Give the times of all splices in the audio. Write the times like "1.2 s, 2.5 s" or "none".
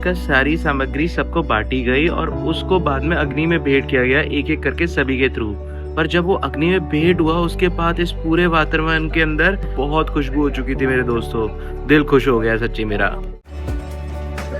13.1 s